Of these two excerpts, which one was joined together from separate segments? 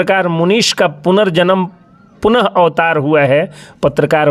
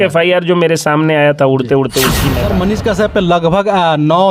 second; 1 cut; at 2.3 s

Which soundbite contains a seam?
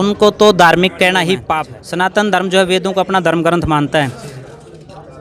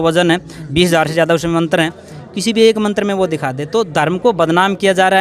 first; 1 cut; at 1.4 s

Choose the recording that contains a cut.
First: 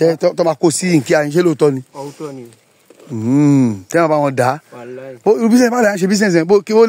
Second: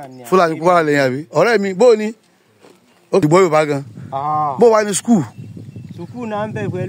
second; 1 cut; at 3.2 s

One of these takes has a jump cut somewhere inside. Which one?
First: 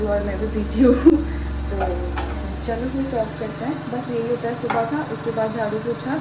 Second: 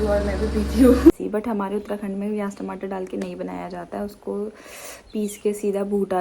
second; 1 cut; at 1.1 s

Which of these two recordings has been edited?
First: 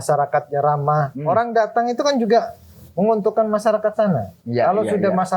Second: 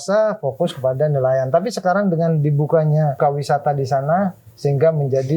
second; 1 cut; at 3.2 s

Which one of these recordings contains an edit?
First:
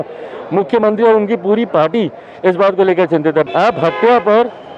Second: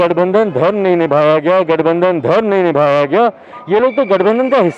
first; 1 cut; at 3.4 s

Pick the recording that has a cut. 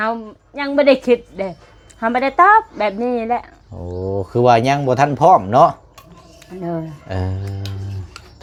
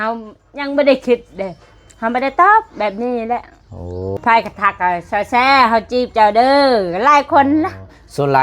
second; 1 cut; at 4.2 s

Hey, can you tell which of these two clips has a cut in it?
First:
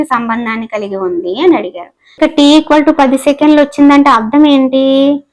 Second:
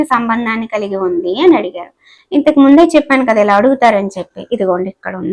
first; 1 cut; at 2.0 s

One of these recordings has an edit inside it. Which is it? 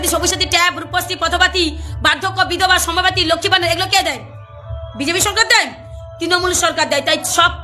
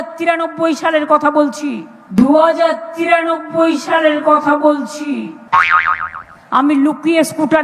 second; 1 cut; at 5.3 s

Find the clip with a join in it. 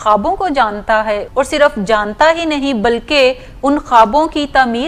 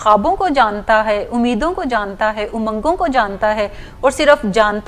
first; 1 cut; at 1.2 s

